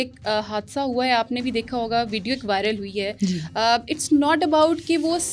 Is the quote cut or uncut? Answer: uncut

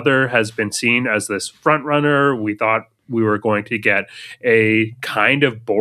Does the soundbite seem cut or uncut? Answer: uncut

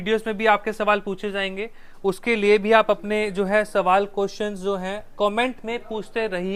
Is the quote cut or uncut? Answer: uncut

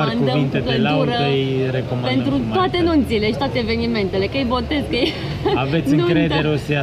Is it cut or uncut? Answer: uncut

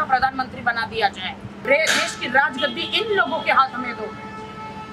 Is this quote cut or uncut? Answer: cut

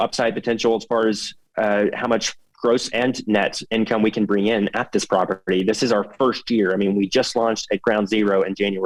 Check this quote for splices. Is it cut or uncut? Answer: uncut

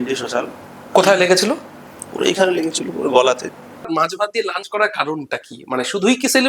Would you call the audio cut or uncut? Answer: cut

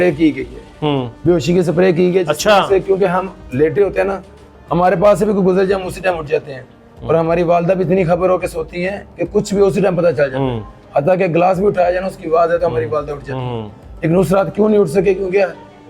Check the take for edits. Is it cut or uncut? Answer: uncut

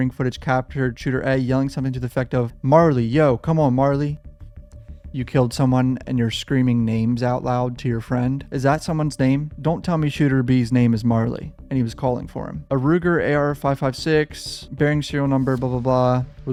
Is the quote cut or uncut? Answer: uncut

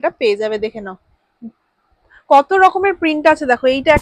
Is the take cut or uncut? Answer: uncut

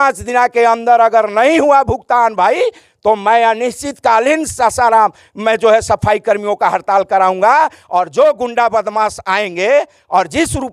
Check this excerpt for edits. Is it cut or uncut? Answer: uncut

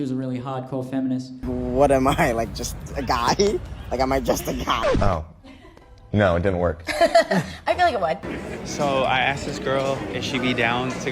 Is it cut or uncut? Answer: cut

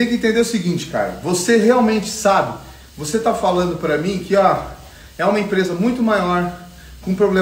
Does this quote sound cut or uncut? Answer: uncut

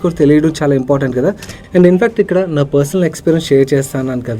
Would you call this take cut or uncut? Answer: cut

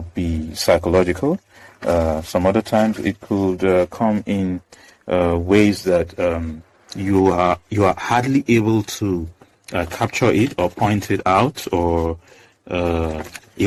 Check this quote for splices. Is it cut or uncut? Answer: uncut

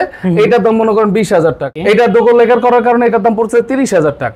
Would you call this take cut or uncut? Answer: cut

